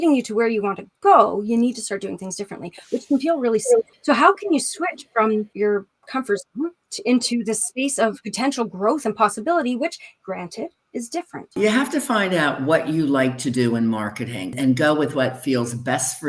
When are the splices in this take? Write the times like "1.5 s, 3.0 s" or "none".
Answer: 3.9 s, 5.5 s, 6.9 s, 8.3 s, 10.1 s, 11.5 s, 14.5 s

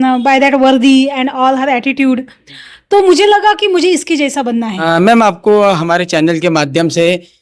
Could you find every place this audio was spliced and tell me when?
4.7 s

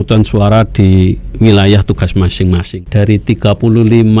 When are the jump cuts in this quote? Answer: 2.8 s

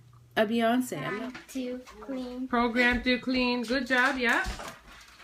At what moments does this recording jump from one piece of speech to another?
0.9 s

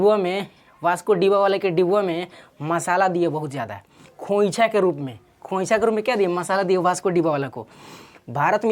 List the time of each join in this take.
none

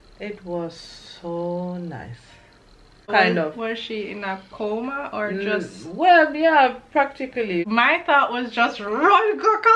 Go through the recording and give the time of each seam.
3.1 s, 7.7 s

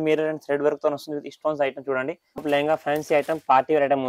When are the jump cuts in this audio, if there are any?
2.4 s

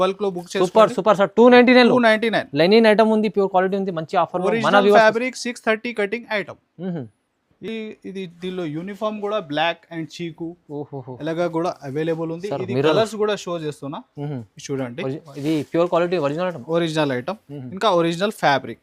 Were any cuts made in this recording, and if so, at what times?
none

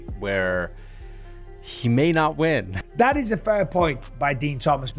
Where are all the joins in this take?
2.8 s

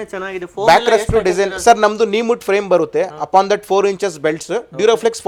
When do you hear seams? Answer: none

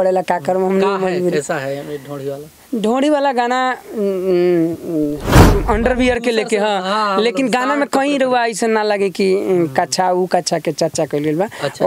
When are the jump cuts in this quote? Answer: 5.4 s

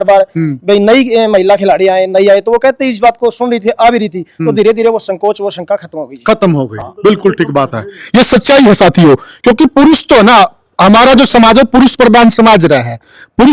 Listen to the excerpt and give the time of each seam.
none

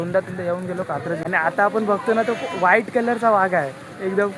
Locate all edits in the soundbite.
1.2 s

